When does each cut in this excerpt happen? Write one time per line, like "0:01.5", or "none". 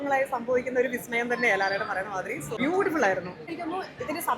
0:02.5
0:03.5